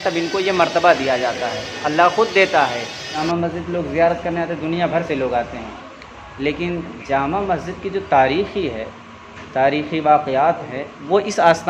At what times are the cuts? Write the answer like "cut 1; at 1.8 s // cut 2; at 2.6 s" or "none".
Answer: cut 1; at 3.2 s